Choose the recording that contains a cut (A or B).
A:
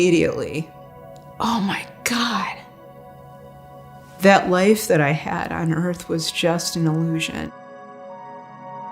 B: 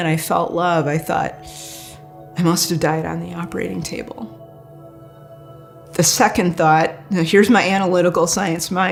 A